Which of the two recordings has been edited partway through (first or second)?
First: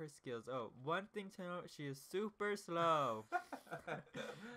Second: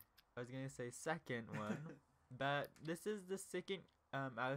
first